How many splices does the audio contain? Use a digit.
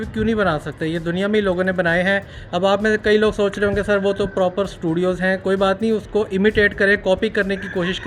0